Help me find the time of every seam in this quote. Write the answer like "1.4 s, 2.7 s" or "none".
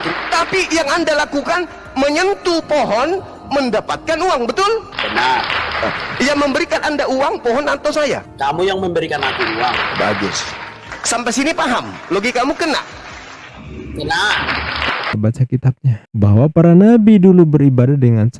15.1 s